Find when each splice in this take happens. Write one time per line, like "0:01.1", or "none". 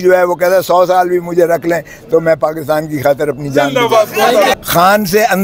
0:04.5